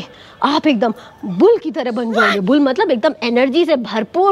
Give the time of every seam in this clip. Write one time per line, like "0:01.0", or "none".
none

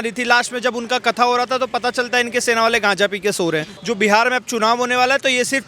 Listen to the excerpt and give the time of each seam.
0:03.7

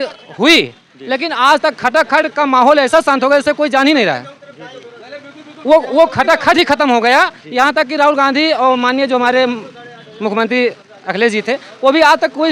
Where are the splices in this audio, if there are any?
none

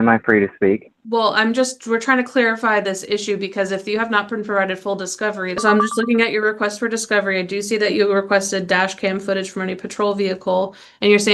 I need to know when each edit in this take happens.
0:00.9
0:05.6

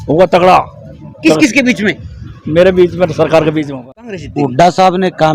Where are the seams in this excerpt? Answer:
0:03.7

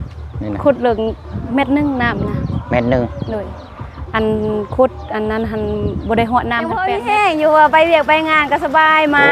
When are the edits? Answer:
0:06.9

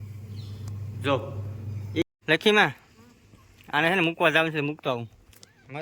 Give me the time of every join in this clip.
0:02.0

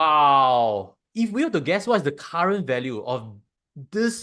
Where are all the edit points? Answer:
0:01.0

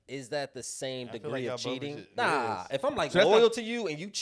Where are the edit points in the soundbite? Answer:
0:02.1

